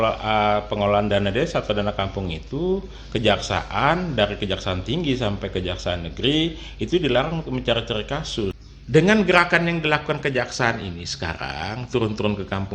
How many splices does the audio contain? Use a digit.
1